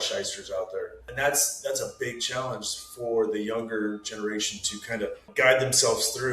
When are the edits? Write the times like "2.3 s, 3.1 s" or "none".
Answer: 1.1 s, 5.3 s

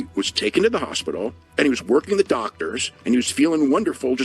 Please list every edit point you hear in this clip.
1.4 s, 2.9 s

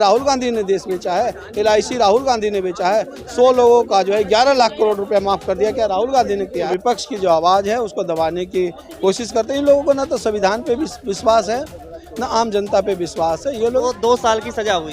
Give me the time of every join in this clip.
6.7 s, 13.8 s

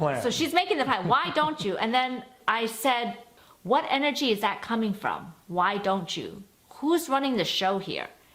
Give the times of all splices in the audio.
2.3 s, 3.4 s

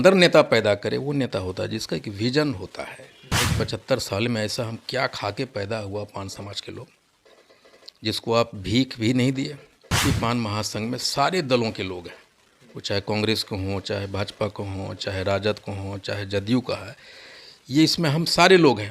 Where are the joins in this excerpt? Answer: 3.5 s, 10.0 s

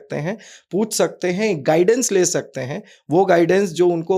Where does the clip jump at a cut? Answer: none

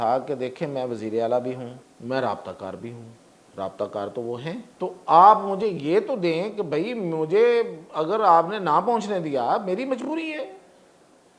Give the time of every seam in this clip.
1.9 s, 4.7 s

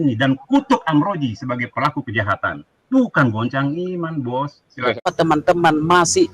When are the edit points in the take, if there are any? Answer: 5.0 s

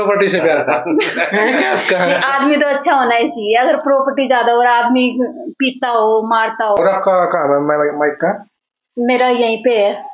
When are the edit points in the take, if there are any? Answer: 6.8 s

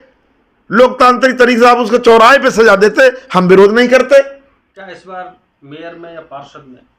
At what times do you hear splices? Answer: 4.6 s

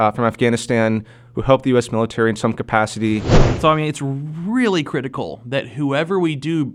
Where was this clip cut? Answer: 3.4 s

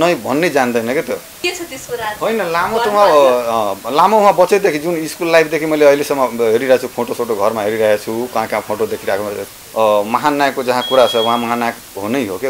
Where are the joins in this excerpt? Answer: 1.3 s, 9.5 s

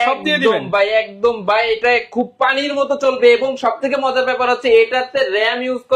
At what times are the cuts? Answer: none

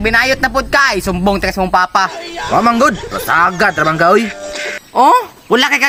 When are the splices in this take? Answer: none

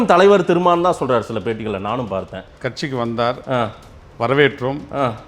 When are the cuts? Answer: 2.6 s

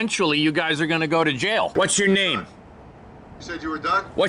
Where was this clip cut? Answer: 1.7 s

